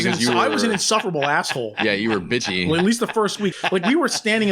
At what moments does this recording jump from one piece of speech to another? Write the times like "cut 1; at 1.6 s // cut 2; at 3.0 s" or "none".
cut 1; at 3.5 s